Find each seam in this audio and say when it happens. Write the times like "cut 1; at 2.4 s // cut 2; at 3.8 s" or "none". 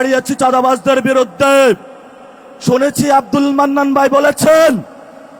none